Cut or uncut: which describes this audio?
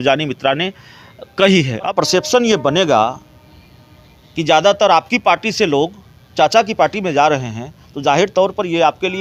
cut